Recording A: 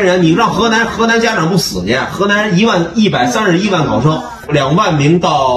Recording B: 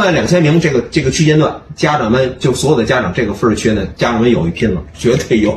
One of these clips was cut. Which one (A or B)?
A